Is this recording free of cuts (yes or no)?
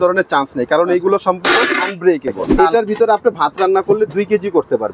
no